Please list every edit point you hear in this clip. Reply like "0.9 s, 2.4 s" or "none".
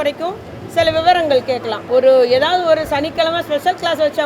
1.7 s